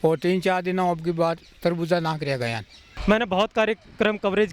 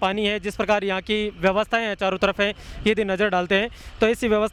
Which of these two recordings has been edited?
first; 1 cut; at 3.0 s

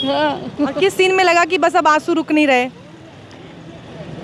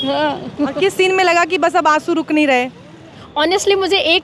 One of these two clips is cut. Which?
second; 1 cut; at 3.2 s

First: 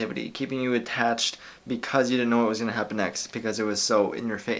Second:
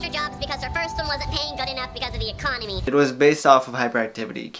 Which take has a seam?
second; 1 cut; at 2.8 s

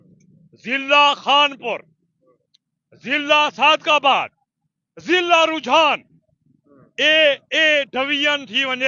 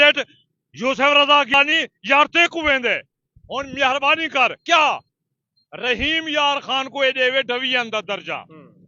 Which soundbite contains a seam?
second; 1 cut; at 1.5 s

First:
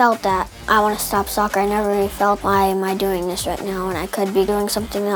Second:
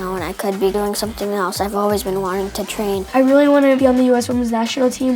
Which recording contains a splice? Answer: second; 1 cut; at 3.1 s

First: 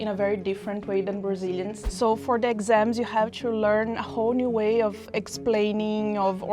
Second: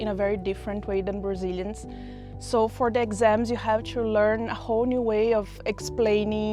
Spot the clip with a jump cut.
first; 1 cut; at 1.8 s

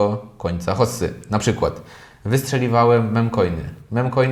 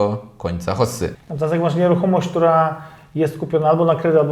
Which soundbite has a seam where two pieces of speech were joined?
second; 1 cut; at 1.2 s

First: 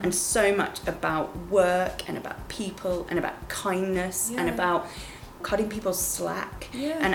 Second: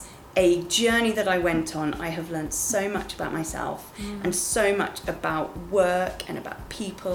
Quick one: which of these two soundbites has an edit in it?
first; 1 cut; at 5.4 s

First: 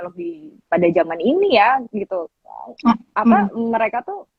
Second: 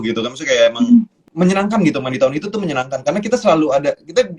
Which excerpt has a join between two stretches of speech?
second; 1 cut; at 1.2 s

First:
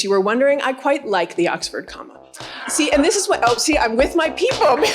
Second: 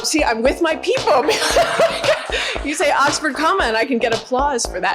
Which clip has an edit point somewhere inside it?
first; 1 cut; at 2.6 s

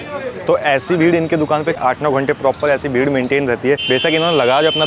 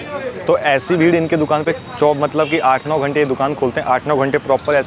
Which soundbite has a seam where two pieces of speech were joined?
first; 2 cuts; at 1.6 s, 3.8 s

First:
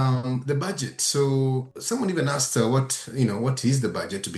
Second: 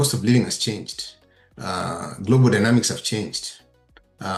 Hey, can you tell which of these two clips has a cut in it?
first; 1 cut; at 1.7 s

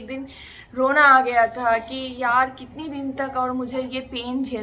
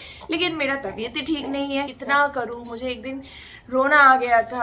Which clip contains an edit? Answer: second; 1 cut; at 2.0 s

